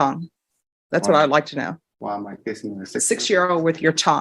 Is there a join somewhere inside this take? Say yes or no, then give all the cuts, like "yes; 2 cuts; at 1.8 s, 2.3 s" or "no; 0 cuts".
no; 0 cuts